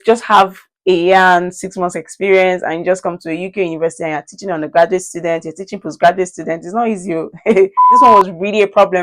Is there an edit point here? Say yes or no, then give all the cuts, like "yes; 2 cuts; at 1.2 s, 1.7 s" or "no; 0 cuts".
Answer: yes; 1 cut; at 8.0 s